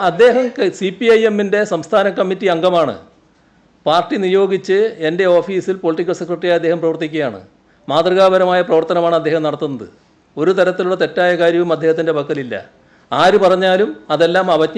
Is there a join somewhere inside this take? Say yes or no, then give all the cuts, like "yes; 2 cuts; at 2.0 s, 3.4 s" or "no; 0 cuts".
no; 0 cuts